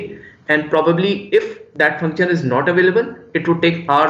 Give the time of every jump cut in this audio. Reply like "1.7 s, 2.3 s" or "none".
none